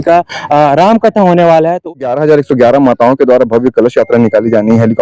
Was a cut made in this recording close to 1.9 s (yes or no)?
yes